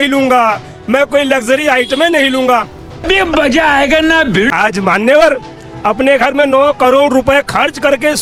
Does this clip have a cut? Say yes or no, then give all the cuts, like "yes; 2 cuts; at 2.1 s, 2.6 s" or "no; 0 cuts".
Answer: no; 0 cuts